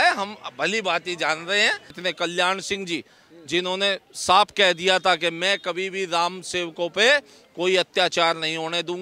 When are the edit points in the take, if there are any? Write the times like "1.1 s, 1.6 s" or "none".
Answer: 1.9 s